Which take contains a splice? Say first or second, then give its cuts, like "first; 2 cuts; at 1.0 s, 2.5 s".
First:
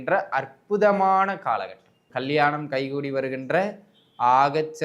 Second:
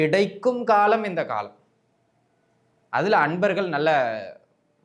first; 1 cut; at 2.0 s